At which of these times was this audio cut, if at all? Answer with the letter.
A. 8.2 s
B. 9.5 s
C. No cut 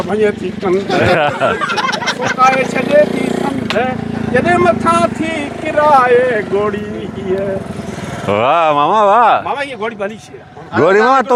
C